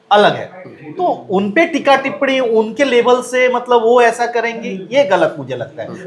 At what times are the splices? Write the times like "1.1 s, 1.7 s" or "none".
none